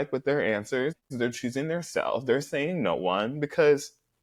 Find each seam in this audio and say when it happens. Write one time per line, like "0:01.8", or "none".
none

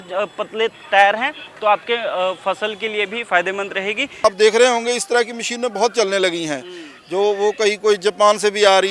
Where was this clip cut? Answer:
0:04.2

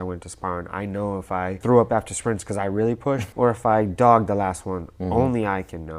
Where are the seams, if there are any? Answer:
0:01.6
0:03.3

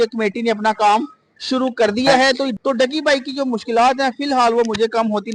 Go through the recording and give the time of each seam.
0:02.5

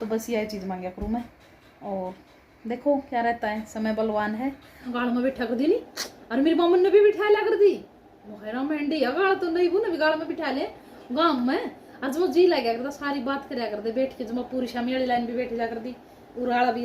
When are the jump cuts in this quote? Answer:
0:04.9

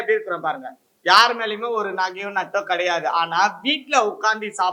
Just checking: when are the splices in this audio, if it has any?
none

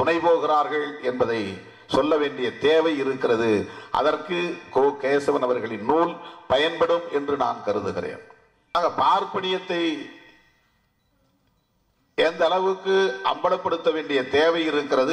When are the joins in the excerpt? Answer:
0:08.8

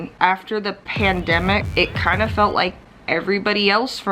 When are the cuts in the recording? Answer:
0:01.6

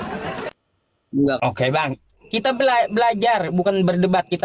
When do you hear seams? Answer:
0:01.4

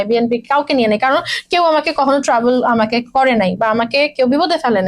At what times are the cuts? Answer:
none

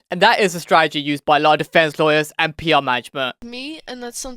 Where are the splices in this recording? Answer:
0:03.4

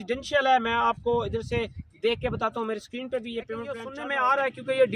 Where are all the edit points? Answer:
0:03.9

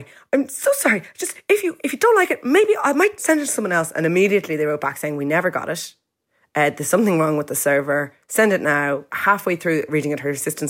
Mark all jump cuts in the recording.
0:09.1
0:09.9

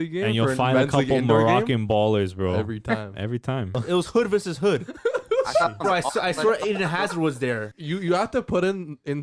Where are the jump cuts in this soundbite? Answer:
0:03.8
0:07.7

